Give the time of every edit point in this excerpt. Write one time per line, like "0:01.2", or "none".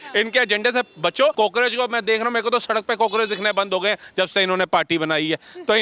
0:01.3